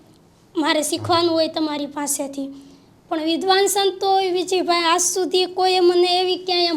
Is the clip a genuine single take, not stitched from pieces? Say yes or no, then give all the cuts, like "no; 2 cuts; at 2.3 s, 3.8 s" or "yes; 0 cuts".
yes; 0 cuts